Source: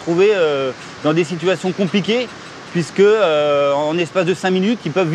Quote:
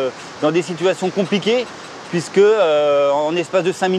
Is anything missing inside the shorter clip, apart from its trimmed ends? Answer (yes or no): no